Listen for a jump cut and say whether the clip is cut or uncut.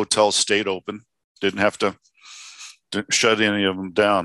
uncut